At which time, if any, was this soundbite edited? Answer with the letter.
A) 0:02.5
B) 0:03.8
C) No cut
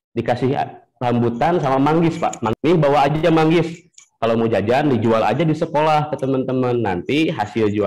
A